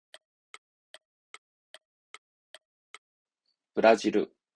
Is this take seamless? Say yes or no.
no